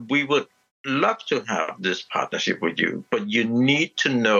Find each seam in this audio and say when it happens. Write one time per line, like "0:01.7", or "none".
none